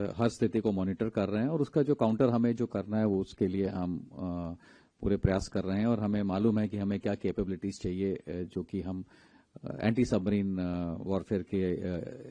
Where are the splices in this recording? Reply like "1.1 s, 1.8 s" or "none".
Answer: none